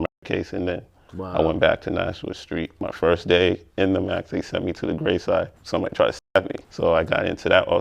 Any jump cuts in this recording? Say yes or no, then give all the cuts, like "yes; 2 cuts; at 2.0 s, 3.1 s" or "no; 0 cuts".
yes; 2 cuts; at 2.8 s, 5.6 s